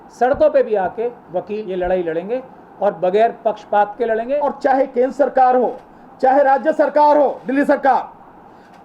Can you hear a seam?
yes; 2 cuts; at 1.6 s, 4.4 s

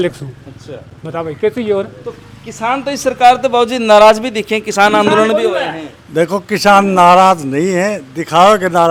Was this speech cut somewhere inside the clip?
no; 0 cuts

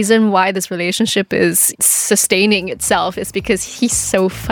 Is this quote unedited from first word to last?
no; 1 cut; at 1.7 s

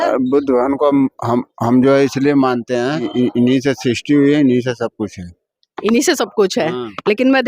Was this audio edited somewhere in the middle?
yes; 1 cut; at 3.1 s

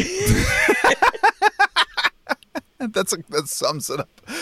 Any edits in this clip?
no; 0 cuts

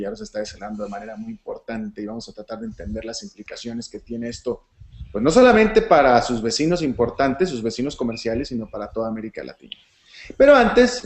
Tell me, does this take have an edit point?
no; 0 cuts

